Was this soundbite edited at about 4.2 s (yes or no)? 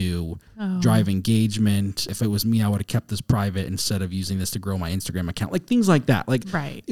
no